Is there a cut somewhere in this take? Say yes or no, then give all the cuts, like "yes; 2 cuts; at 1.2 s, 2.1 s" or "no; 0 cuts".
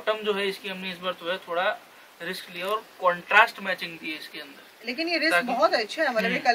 no; 0 cuts